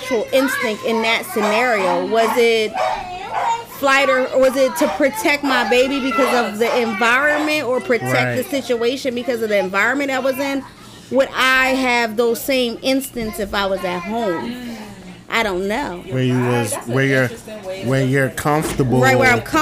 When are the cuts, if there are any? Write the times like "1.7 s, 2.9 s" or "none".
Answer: none

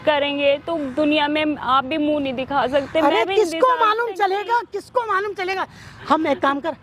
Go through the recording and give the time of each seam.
none

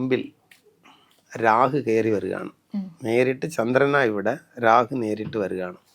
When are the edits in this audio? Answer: none

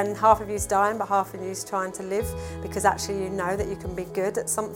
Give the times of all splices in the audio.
none

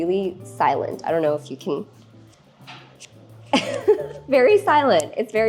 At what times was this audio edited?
4.1 s

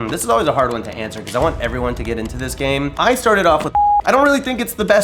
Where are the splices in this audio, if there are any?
3.9 s

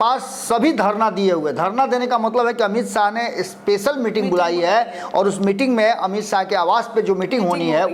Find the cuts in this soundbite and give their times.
none

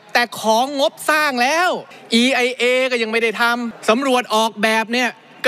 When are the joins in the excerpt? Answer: 1.9 s, 3.7 s

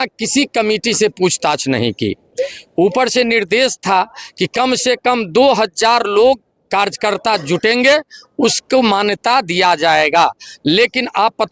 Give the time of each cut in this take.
none

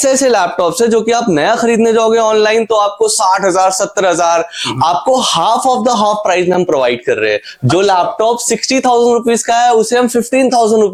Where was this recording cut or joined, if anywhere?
none

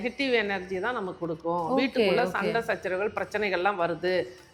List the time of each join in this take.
none

